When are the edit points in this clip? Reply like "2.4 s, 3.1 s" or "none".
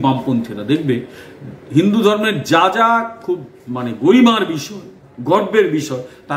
none

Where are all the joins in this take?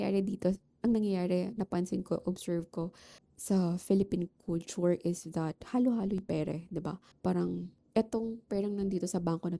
7.1 s, 7.7 s

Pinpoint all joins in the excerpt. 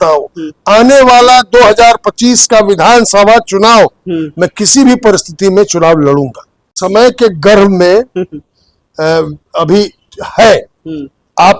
6.8 s

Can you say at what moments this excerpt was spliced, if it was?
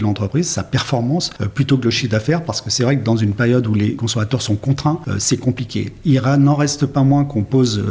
1.4 s, 4.0 s, 5.1 s

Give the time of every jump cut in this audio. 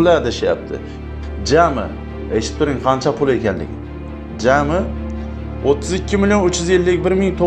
1.0 s

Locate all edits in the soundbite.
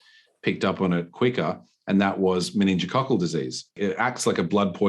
3.8 s

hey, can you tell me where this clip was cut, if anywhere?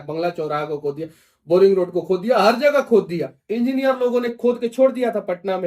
3.4 s

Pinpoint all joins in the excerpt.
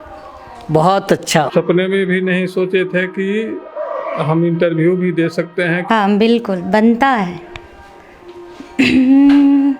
1.5 s, 5.8 s

